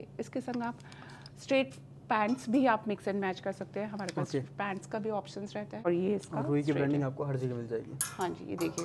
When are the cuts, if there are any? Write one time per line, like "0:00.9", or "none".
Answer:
0:05.9